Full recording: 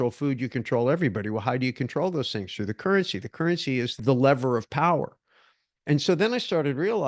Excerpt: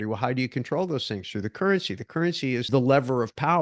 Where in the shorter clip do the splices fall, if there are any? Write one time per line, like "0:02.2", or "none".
0:02.6